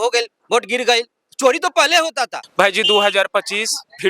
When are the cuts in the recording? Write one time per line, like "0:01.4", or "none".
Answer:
0:02.4